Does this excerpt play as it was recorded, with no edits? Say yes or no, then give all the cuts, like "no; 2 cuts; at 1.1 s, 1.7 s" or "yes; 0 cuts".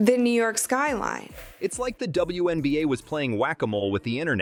yes; 0 cuts